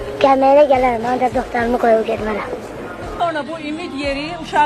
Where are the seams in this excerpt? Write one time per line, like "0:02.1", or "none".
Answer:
none